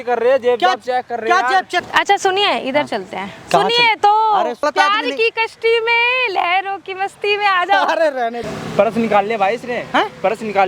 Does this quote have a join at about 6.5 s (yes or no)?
no